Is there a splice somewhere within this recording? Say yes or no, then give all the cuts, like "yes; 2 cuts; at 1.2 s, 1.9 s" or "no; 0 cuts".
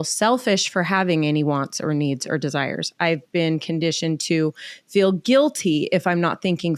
no; 0 cuts